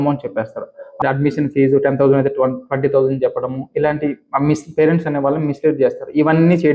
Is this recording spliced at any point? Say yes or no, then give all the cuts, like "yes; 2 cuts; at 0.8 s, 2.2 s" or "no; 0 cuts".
yes; 1 cut; at 1.0 s